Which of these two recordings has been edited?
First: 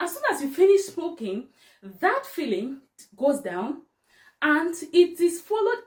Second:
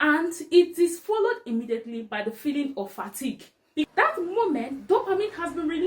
second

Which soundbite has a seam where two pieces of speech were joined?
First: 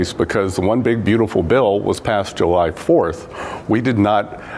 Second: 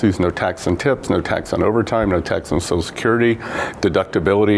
second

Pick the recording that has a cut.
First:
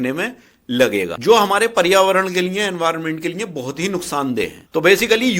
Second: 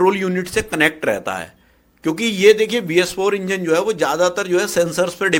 first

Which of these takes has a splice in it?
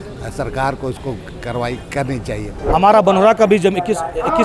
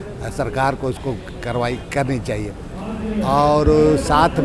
first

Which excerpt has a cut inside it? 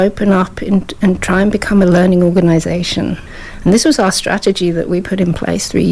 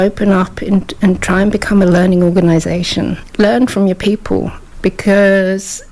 second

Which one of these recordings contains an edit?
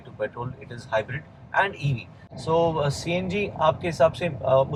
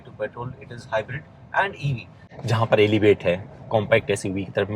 second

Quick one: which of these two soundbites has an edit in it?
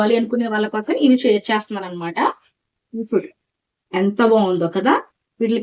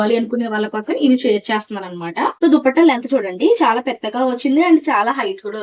second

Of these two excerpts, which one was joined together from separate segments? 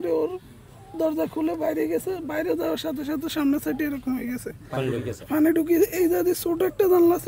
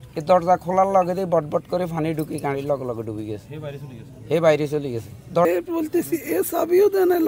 second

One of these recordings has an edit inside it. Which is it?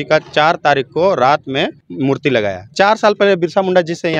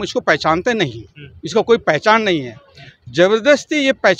first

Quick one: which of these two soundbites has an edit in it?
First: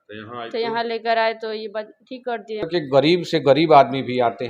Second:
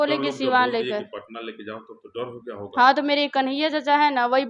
first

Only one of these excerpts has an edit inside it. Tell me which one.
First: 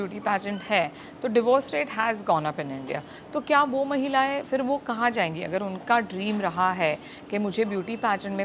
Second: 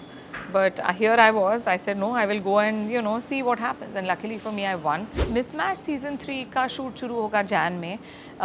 second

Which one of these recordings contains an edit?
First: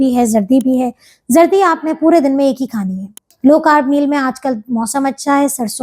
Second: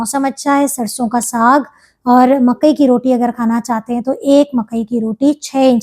first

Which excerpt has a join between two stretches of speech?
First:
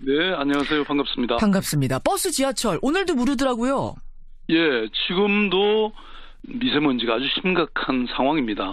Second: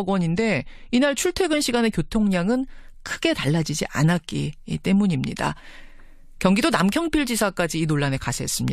second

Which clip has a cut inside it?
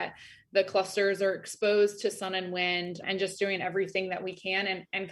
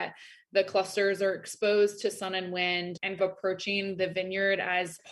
second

